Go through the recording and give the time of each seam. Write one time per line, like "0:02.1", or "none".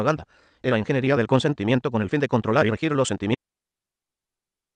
none